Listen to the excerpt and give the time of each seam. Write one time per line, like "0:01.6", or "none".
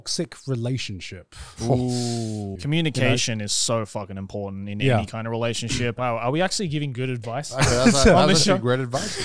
0:02.5
0:06.0